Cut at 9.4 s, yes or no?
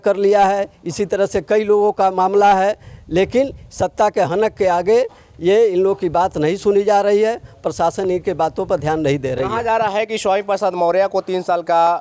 no